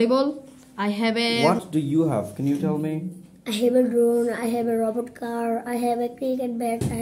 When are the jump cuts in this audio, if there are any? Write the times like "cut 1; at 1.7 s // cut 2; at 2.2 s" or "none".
cut 1; at 1.4 s

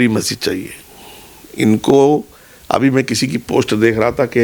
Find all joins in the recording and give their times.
none

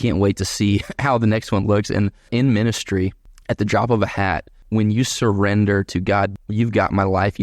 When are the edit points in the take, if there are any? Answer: cut 1; at 2.3 s // cut 2; at 3.3 s // cut 3; at 4.6 s // cut 4; at 6.3 s

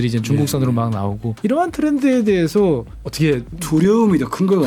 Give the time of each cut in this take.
cut 1; at 1.3 s // cut 2; at 3.2 s

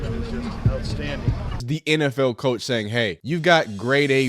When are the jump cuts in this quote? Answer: cut 1; at 1.6 s // cut 2; at 3.2 s

